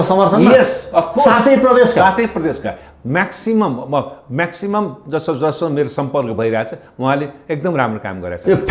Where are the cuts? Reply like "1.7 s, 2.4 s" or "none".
none